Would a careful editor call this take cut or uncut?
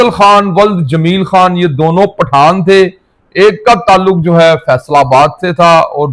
uncut